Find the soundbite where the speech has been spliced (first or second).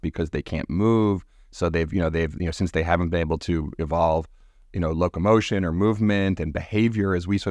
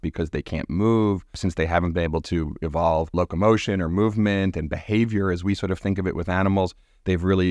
second